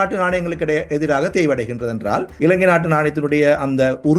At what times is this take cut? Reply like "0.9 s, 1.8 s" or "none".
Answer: 2.3 s

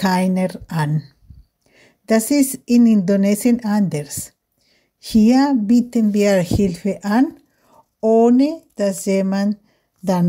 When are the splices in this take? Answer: 1.6 s

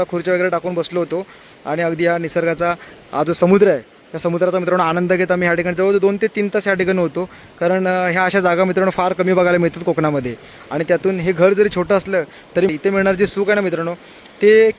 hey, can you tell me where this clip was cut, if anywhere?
none

